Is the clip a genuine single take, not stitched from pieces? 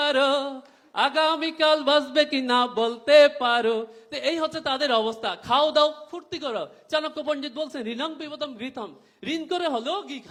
yes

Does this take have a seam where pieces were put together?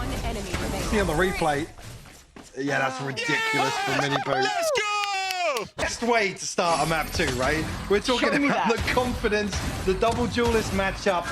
yes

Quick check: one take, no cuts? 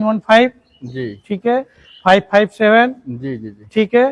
yes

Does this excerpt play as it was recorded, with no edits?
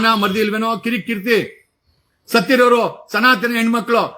yes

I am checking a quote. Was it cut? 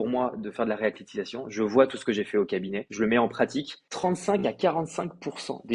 yes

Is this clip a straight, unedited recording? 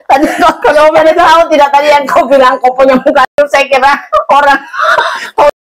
yes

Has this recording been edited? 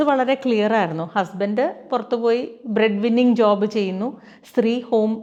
no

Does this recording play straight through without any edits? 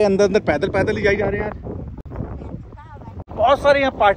yes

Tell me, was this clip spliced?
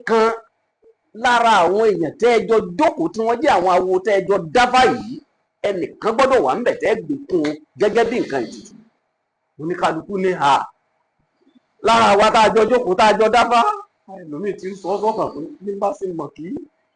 no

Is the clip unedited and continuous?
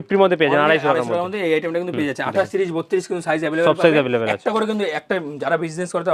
yes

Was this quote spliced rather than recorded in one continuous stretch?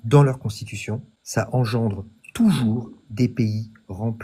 yes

